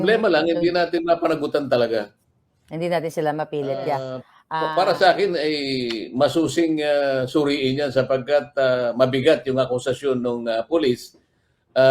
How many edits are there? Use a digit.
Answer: 1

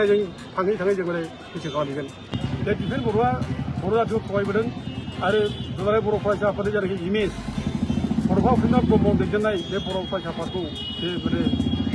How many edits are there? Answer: 1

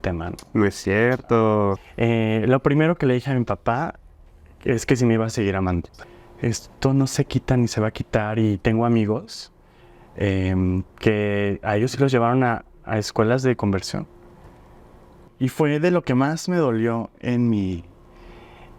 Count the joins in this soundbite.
3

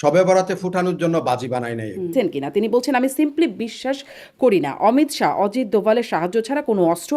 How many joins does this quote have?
1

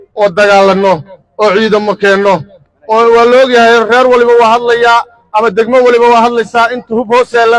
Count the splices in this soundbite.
0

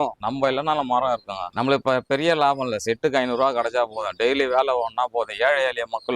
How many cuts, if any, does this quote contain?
1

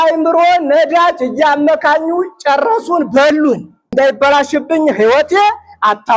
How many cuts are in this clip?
1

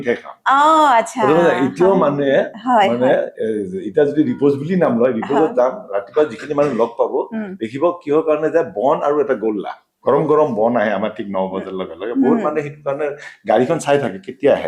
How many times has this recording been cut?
0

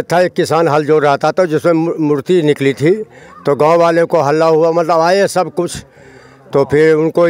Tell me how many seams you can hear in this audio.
0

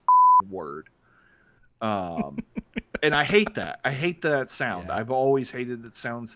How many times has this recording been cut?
0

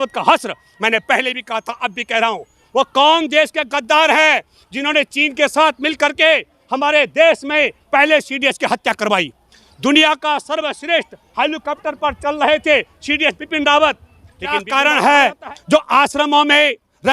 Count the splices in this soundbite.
1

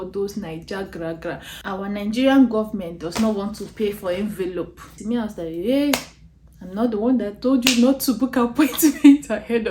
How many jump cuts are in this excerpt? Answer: 2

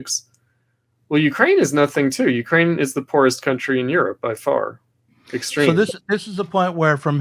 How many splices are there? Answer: 0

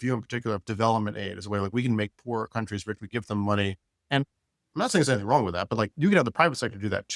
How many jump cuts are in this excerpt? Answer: 0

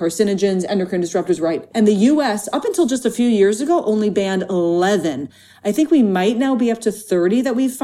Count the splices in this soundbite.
1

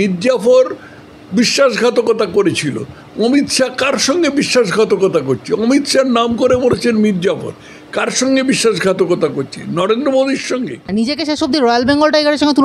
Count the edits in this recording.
1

